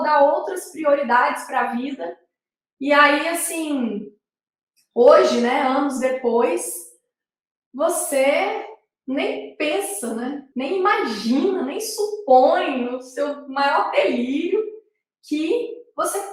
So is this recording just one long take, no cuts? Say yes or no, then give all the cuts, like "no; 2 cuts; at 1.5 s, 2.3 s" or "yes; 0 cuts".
no; 1 cut; at 10.4 s